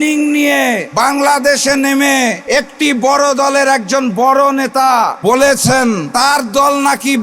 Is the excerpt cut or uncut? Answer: cut